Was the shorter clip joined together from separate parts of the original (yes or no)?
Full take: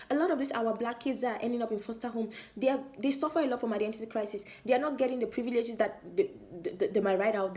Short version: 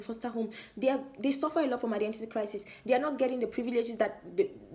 no